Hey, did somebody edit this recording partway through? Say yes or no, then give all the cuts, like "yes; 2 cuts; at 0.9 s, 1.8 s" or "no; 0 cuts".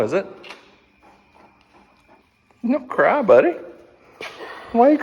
yes; 1 cut; at 2.2 s